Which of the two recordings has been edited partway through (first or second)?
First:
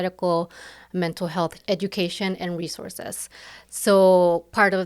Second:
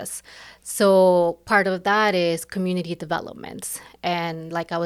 first